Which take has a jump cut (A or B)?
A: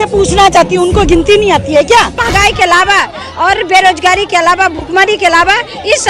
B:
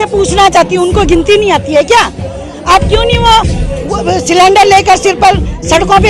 A